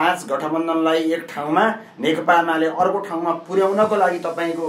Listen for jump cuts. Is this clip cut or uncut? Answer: uncut